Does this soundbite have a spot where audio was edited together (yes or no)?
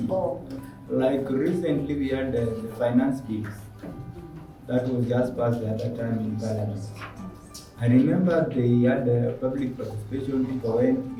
no